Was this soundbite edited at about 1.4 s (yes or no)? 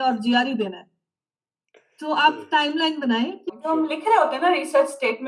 no